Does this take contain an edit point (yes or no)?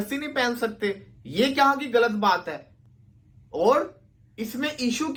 no